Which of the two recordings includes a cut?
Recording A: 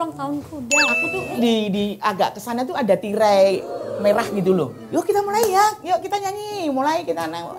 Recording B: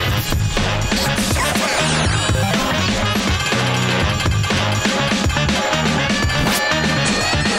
A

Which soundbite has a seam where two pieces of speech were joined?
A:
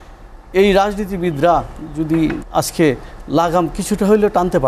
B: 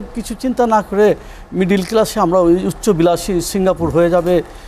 A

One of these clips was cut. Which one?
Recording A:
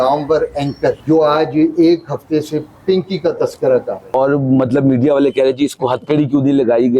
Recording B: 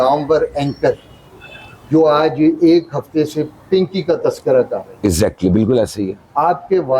A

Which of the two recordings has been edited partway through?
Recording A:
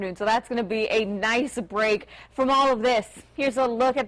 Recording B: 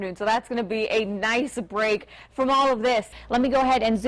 B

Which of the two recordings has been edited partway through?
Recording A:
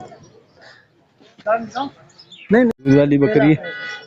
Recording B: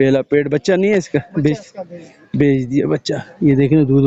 A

